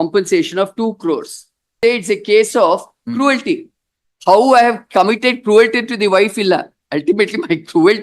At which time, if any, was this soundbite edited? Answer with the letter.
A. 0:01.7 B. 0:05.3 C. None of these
A